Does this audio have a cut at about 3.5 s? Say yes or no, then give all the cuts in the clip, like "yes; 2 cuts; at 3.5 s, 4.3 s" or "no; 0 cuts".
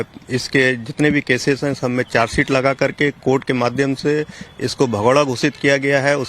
no; 1 cut; at 2.1 s